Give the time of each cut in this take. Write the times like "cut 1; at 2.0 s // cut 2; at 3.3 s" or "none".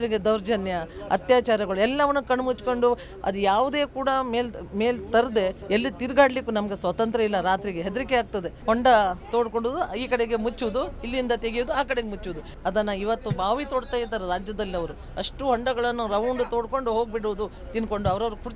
cut 1; at 5.6 s // cut 2; at 8.5 s // cut 3; at 12.4 s